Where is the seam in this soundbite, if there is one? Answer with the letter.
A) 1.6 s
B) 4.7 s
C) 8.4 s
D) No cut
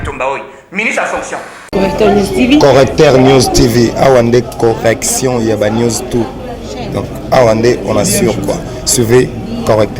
A